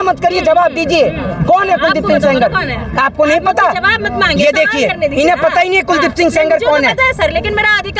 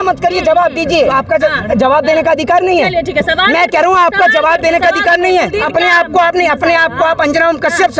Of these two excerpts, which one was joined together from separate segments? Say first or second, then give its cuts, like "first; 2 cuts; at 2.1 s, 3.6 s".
second; 2 cuts; at 1.1 s, 5.6 s